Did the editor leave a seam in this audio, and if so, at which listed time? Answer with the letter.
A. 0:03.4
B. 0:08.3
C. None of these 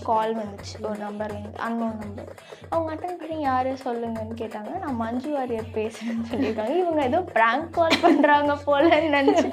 C